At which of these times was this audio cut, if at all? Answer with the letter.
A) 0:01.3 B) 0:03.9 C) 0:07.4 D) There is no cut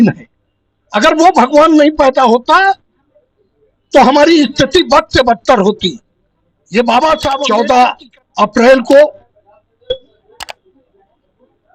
C